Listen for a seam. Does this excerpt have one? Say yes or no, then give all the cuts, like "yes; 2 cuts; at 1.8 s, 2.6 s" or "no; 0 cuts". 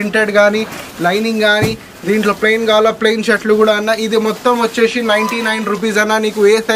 no; 0 cuts